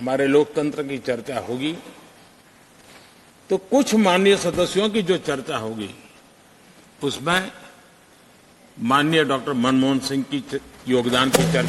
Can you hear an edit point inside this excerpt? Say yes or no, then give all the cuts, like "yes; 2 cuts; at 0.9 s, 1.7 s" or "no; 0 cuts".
no; 0 cuts